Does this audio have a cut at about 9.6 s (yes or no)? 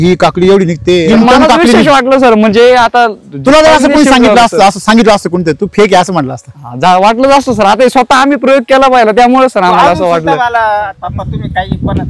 no